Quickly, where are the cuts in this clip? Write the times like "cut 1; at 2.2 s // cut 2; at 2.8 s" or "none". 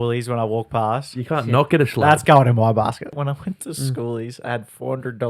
cut 1; at 3.2 s